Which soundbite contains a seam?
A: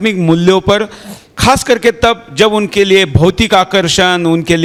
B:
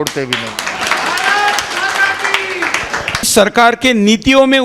B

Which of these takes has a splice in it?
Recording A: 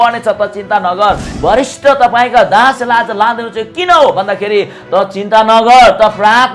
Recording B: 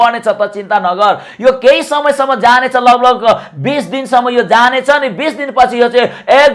A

